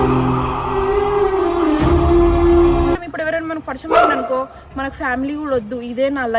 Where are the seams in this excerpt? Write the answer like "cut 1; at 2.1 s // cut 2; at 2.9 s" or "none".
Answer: cut 1; at 3.1 s